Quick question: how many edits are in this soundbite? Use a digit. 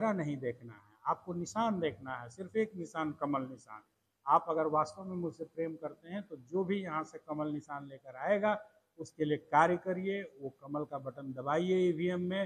0